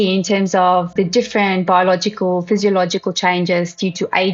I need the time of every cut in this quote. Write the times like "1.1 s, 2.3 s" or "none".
0.9 s